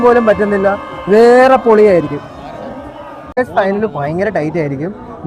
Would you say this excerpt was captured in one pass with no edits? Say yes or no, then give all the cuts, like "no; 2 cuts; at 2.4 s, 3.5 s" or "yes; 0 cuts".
yes; 0 cuts